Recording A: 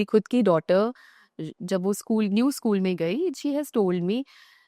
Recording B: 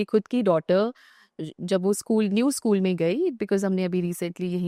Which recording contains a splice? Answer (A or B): A